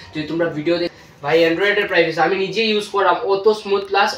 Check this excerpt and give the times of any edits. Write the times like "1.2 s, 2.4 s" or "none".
0.9 s